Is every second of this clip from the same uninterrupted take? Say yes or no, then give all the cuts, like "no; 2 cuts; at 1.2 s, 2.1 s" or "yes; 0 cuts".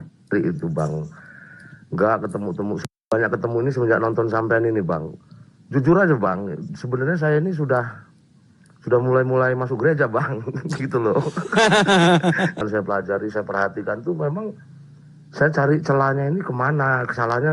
no; 1 cut; at 12.6 s